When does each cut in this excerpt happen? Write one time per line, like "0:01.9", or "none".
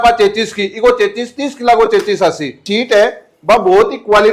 0:02.6